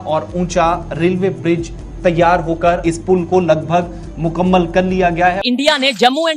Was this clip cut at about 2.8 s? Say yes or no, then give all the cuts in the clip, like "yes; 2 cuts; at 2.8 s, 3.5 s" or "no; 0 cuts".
yes; 2 cuts; at 2.8 s, 5.4 s